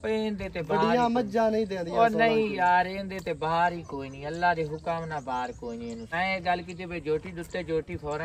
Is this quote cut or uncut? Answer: cut